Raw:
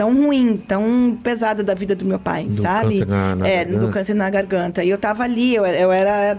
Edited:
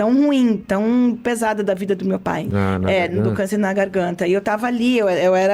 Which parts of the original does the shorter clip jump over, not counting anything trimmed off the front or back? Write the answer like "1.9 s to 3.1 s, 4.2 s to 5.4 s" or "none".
2.5 s to 3.1 s